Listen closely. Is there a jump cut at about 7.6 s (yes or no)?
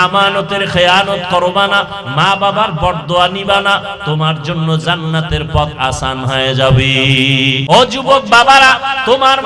yes